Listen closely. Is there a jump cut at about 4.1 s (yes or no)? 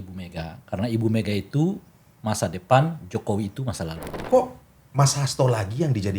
yes